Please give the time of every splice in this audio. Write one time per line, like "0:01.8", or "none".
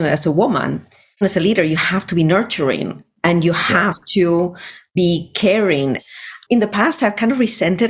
0:06.0